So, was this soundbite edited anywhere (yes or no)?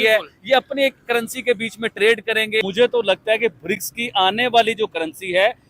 yes